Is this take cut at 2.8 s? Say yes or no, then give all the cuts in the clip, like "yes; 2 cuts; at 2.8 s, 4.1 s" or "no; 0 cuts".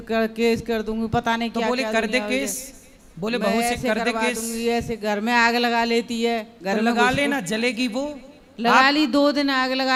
no; 0 cuts